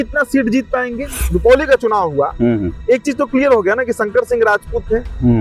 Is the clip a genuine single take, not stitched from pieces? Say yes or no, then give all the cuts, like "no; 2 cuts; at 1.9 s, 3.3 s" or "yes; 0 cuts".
no; 1 cut; at 1.2 s